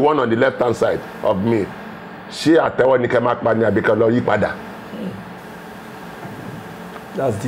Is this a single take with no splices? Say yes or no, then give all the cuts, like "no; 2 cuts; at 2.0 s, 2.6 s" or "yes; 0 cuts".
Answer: yes; 0 cuts